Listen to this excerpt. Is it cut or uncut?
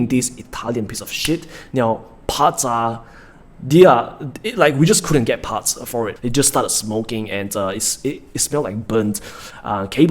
cut